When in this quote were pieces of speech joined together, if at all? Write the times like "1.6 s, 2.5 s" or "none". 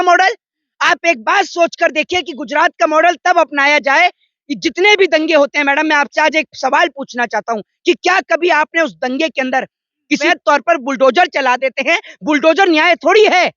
10.2 s